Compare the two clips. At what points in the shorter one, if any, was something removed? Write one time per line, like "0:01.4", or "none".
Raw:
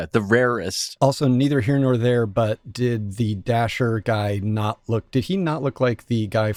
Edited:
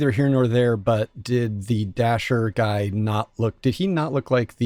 none